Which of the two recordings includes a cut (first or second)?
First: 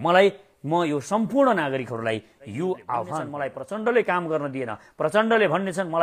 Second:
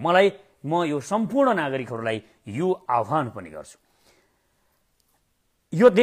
first